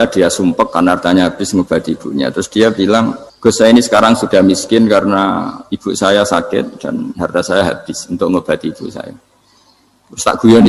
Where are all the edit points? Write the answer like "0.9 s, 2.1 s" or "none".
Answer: 3.3 s

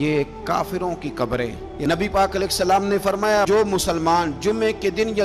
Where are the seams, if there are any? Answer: 1.7 s

